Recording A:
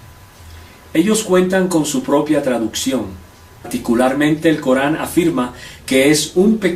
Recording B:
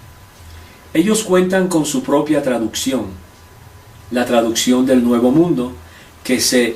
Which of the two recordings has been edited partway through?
B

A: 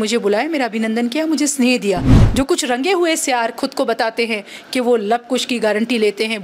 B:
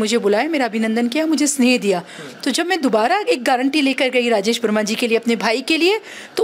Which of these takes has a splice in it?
A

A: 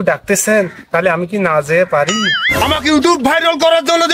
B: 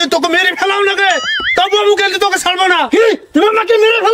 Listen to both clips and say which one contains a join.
A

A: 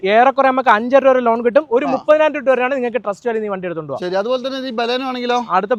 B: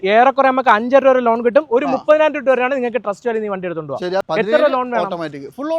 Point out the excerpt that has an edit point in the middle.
B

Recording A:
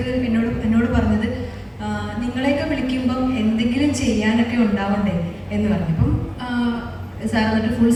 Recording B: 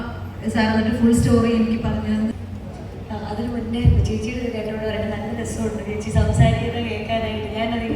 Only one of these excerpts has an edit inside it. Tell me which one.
B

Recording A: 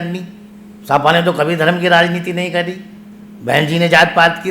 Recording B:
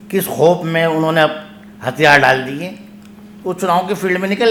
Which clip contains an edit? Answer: A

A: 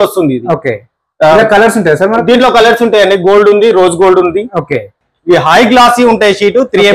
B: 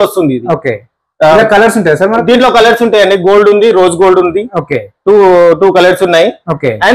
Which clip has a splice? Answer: A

